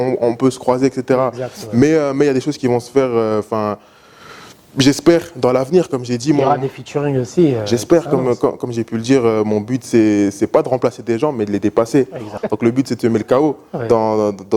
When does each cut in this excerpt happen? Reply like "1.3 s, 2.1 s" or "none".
12.4 s